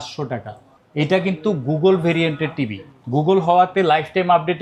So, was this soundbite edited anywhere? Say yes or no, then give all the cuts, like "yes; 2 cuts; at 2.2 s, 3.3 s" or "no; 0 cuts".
no; 0 cuts